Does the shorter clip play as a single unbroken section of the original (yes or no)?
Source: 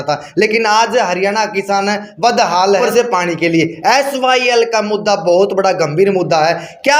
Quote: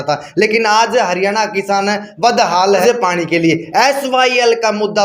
no